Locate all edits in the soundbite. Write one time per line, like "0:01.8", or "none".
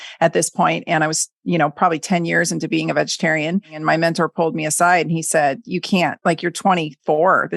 0:03.8